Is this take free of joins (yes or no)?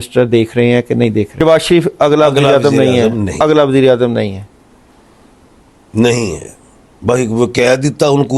no